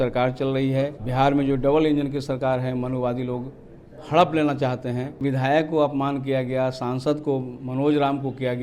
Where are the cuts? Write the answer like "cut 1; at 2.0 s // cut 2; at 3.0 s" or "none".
cut 1; at 1.0 s // cut 2; at 5.2 s